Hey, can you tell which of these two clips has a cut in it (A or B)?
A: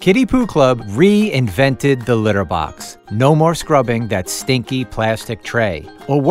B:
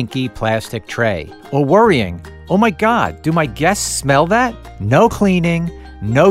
B